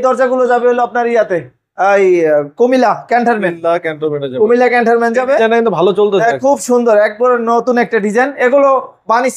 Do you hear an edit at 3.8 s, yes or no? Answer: no